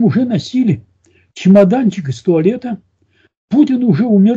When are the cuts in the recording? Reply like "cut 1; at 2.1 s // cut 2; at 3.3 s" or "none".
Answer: none

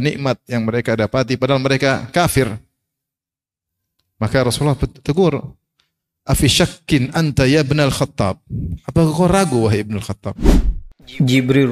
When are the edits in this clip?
cut 1; at 10.3 s

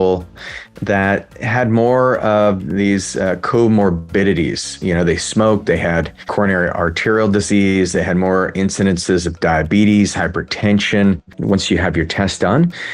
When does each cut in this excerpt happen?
cut 1; at 6.3 s // cut 2; at 11.3 s

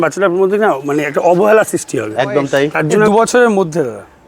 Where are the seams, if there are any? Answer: cut 1; at 3.1 s

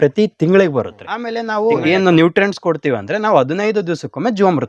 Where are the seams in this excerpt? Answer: cut 1; at 1.4 s

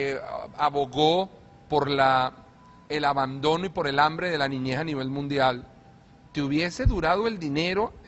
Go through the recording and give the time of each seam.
cut 1; at 5.9 s

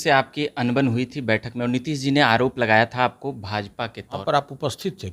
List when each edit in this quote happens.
cut 1; at 4.2 s

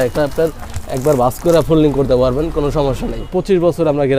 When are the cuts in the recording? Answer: cut 1; at 3.2 s

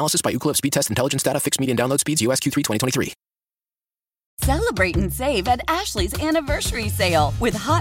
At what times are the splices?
cut 1; at 4.2 s

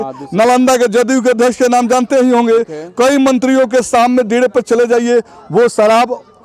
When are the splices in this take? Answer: none

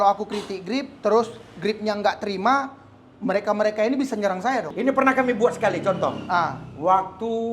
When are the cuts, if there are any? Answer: cut 1; at 4.7 s

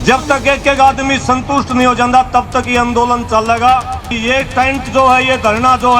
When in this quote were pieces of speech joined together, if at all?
cut 1; at 4.2 s

